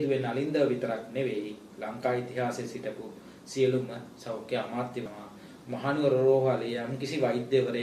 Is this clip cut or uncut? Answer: cut